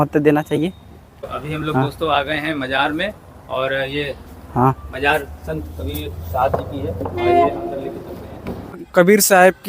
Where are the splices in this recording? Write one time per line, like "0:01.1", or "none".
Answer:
0:01.3
0:08.8